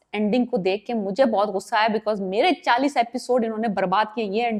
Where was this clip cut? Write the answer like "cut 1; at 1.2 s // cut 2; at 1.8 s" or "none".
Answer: none